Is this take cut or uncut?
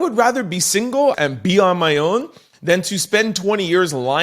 cut